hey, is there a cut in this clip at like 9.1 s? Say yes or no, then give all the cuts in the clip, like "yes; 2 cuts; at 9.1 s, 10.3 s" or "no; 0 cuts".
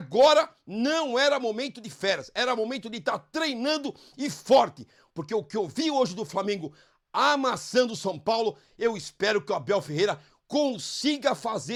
no; 0 cuts